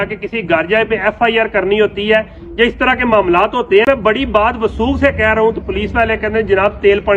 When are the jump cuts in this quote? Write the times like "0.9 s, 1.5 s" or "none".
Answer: 3.9 s